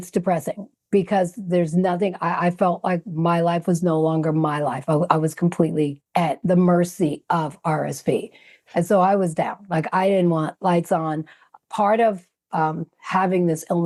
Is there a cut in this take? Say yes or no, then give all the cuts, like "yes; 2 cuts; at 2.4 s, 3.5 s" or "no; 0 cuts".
no; 0 cuts